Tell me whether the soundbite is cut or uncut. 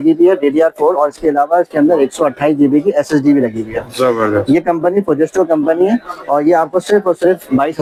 uncut